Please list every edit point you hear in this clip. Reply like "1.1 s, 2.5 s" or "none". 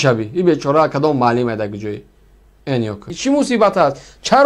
3.0 s